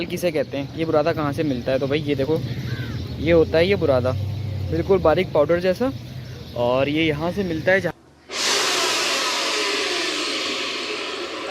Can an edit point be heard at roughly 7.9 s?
yes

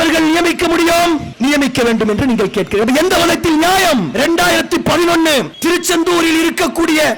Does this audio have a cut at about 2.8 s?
no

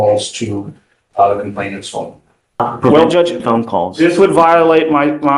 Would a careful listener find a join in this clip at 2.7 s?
yes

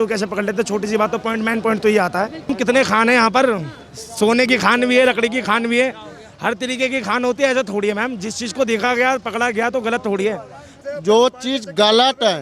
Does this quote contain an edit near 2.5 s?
yes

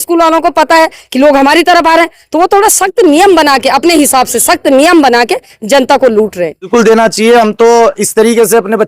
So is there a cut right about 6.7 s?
yes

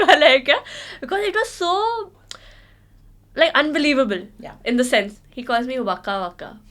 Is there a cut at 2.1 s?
no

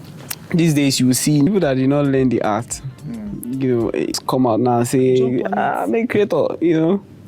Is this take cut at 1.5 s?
yes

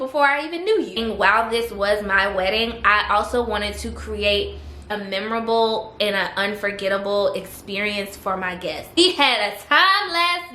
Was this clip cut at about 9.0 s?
yes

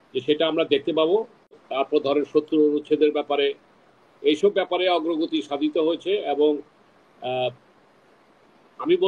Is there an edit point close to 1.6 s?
yes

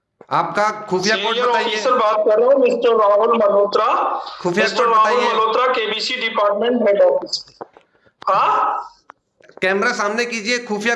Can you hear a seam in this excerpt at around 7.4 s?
no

